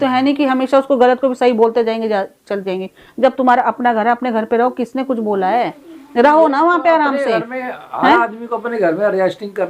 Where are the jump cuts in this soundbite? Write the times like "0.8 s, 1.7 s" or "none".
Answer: none